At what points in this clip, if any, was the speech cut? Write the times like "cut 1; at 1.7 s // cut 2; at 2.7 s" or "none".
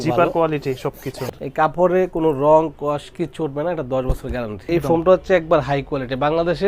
cut 1; at 1.1 s // cut 2; at 4.7 s